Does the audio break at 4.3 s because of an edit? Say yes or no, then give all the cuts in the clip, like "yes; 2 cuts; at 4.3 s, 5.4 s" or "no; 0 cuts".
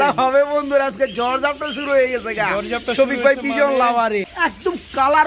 yes; 1 cut; at 4.3 s